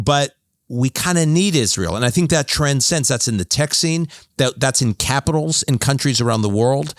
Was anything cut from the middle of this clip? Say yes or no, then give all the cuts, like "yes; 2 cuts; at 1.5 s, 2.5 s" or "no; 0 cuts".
no; 0 cuts